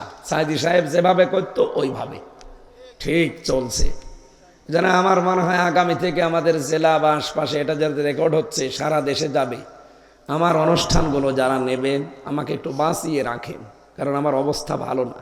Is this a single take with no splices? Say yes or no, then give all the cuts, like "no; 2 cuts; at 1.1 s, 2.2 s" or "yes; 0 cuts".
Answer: yes; 0 cuts